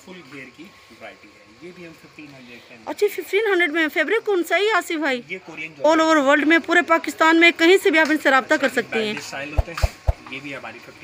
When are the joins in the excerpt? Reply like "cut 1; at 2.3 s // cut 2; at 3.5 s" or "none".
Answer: cut 1; at 5.8 s